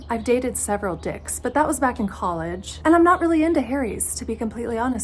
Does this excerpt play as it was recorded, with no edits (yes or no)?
yes